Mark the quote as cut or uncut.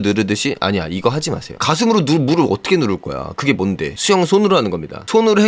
cut